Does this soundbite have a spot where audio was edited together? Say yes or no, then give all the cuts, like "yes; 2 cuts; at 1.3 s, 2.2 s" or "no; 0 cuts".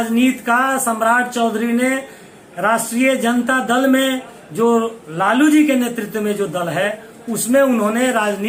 no; 0 cuts